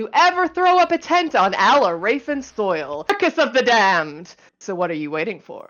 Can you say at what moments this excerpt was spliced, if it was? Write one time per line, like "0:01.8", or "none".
0:03.1